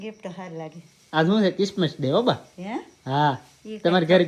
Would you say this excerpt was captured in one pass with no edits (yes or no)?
yes